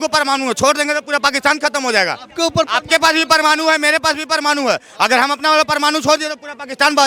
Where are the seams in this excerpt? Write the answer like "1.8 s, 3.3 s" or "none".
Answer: none